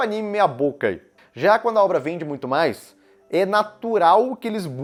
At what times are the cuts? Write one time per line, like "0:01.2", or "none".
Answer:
none

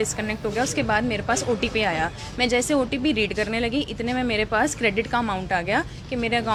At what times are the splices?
none

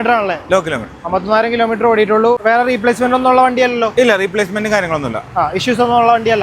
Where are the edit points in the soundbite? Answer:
0:02.4

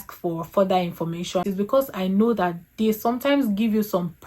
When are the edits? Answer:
0:01.4

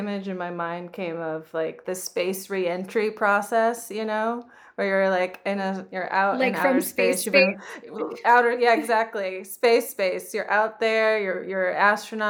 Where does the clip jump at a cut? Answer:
0:01.8

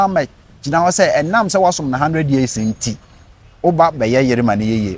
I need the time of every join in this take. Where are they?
none

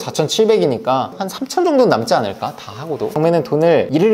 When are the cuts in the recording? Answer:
0:03.1

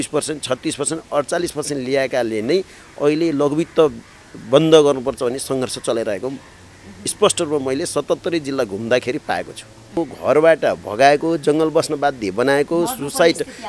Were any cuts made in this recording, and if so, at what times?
0:10.1

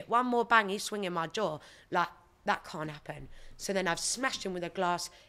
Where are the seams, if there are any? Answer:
none

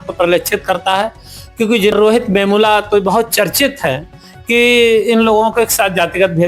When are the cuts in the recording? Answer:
0:01.9

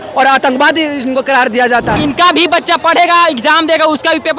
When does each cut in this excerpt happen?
0:02.0

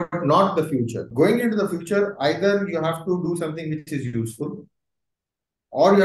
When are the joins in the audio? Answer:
0:01.0

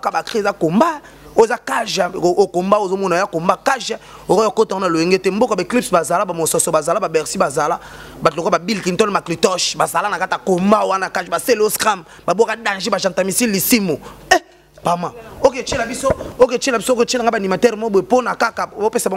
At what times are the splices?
none

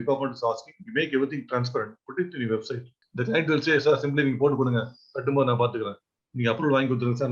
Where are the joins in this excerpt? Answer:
0:03.0

